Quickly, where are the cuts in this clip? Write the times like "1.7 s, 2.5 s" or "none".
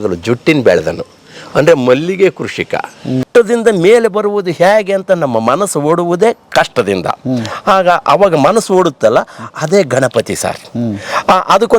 3.2 s